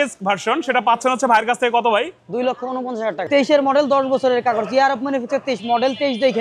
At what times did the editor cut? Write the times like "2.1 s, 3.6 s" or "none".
3.3 s